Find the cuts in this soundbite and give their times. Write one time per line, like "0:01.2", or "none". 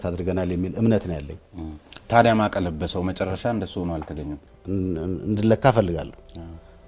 0:04.5